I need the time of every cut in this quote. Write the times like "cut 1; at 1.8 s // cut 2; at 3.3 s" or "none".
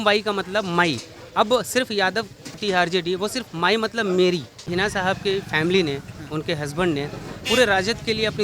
cut 1; at 4.7 s